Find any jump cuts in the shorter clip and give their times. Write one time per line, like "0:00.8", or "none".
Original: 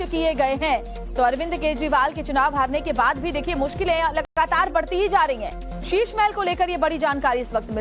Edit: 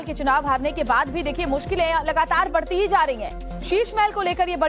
0:02.1